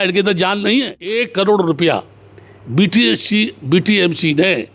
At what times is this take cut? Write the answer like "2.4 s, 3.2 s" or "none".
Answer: 1.0 s